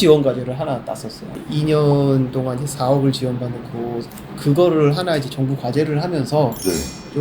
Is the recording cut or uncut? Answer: cut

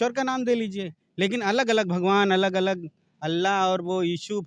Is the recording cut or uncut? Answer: uncut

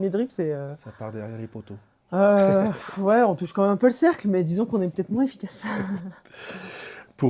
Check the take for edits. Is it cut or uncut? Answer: uncut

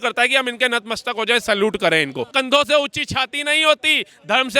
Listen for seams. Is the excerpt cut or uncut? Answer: cut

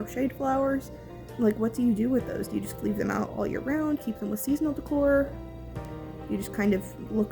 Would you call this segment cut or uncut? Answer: cut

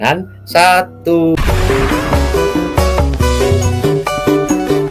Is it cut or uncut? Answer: cut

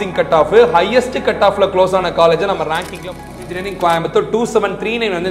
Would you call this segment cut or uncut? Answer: cut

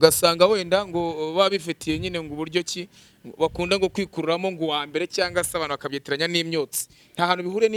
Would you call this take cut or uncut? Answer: uncut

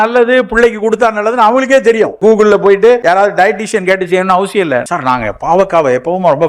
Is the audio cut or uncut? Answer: cut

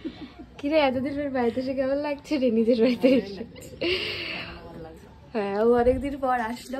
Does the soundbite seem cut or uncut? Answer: uncut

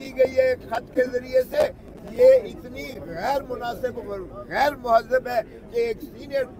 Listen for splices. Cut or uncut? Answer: uncut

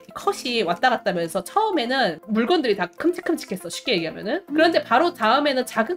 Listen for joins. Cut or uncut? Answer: cut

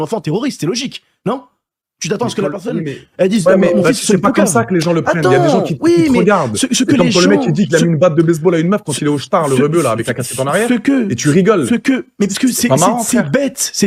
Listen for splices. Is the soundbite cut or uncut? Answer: uncut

